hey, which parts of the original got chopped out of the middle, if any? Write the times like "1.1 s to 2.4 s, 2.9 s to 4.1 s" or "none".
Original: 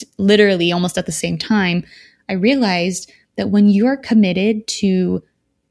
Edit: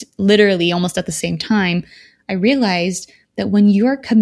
none

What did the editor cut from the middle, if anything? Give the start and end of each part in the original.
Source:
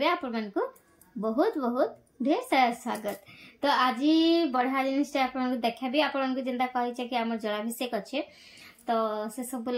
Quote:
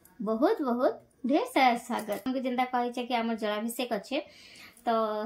3.2 s to 6.3 s

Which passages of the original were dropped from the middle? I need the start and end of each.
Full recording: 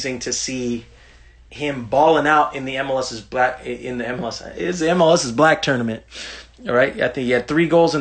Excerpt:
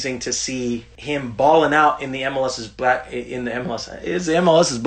0.9 s to 1.5 s

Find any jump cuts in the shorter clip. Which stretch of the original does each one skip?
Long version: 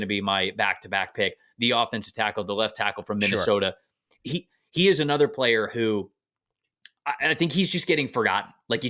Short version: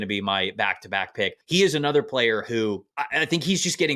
1.4 s to 4.6 s, 6.2 s to 7.0 s

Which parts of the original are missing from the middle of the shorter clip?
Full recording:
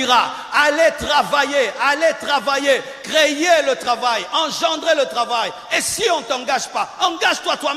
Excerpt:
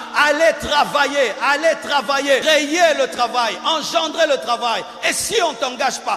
2.8 s to 3.1 s

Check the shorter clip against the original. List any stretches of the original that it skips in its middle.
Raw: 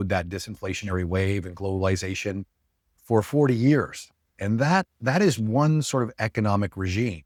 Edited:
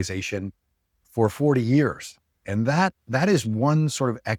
none

